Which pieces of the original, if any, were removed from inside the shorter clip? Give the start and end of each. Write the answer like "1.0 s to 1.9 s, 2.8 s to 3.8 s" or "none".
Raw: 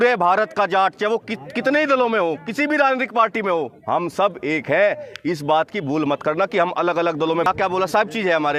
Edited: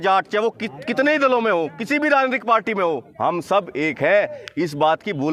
none